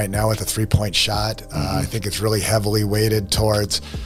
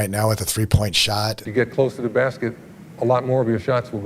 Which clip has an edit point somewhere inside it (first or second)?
second